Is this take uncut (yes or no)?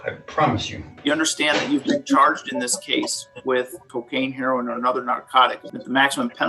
no